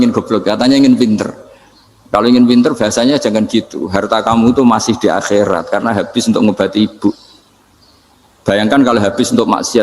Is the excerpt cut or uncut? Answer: uncut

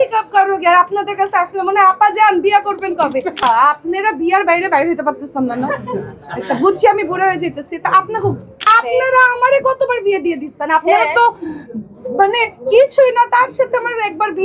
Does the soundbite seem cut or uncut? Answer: cut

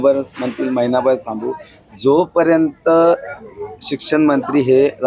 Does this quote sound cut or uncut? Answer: uncut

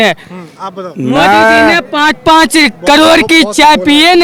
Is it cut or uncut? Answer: uncut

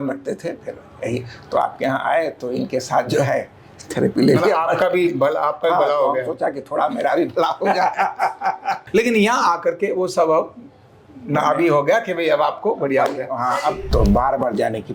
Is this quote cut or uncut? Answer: cut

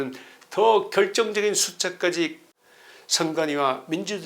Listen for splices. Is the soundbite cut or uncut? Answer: cut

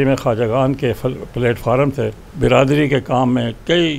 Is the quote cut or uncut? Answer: cut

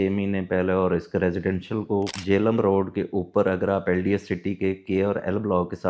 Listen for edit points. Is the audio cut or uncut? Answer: cut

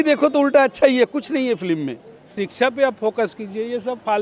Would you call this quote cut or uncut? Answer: cut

